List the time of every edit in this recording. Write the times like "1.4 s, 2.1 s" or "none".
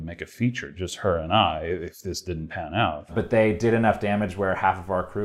3.1 s